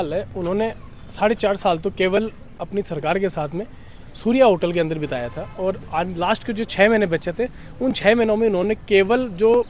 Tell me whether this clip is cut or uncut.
uncut